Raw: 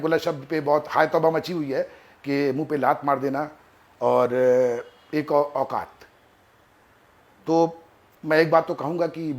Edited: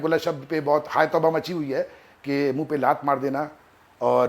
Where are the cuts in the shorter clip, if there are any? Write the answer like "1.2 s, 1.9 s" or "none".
none